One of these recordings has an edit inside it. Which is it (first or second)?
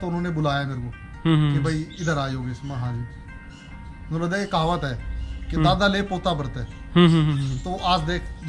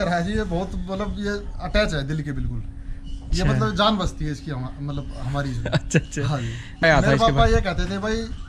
second